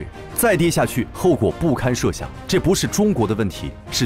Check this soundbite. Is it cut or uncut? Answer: cut